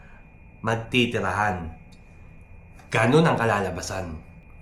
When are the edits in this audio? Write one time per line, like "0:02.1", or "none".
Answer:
none